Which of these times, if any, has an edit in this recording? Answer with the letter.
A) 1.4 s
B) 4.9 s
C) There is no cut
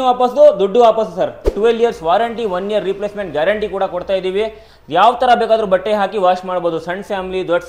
A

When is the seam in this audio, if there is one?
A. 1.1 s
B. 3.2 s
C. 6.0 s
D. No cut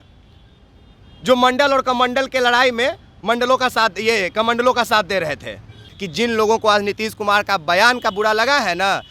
C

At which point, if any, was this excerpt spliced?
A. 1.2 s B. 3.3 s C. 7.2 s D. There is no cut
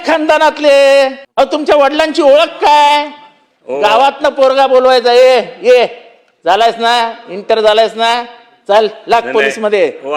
A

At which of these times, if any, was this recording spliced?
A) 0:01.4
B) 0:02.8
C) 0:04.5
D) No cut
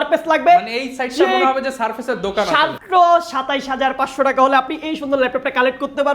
B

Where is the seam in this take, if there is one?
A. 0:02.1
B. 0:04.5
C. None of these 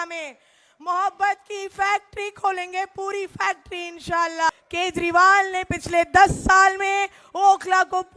B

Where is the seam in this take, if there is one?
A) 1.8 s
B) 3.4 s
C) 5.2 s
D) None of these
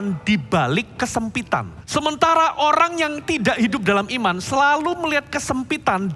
A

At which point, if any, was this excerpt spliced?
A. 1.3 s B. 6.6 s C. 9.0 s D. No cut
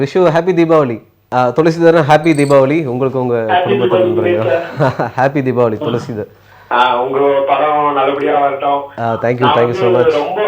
A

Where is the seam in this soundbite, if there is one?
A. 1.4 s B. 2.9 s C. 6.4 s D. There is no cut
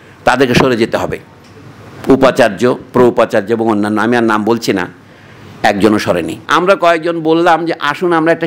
C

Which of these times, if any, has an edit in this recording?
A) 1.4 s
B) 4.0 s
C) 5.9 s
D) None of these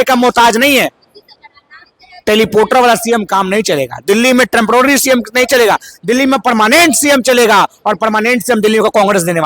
A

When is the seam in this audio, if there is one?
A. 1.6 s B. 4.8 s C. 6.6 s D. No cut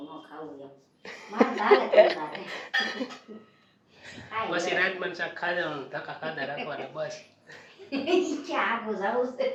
D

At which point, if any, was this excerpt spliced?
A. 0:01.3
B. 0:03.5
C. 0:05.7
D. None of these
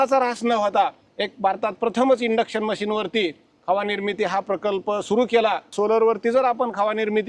C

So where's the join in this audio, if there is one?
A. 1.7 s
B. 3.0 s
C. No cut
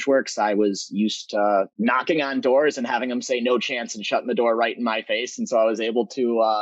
A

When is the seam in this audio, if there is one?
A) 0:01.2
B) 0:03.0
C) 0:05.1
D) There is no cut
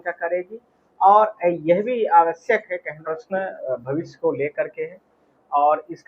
B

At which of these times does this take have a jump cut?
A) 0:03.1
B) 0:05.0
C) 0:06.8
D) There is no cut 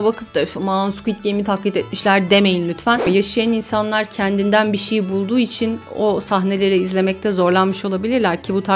A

